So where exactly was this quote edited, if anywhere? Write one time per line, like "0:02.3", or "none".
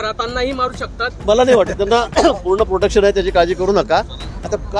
0:01.1